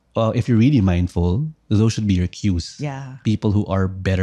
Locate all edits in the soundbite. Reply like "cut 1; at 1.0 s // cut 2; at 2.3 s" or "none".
cut 1; at 3.1 s